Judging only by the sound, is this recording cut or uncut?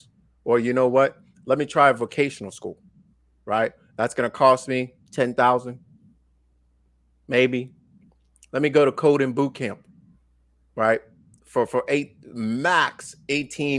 uncut